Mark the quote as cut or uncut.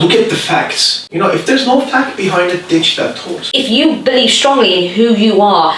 cut